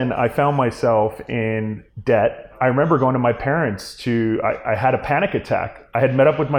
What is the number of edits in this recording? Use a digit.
1